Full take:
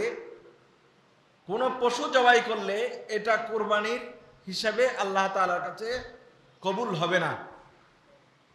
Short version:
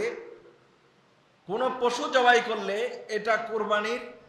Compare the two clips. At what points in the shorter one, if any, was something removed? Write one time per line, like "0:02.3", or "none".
none